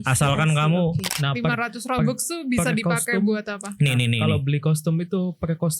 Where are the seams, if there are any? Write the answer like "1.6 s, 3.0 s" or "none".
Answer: 1.1 s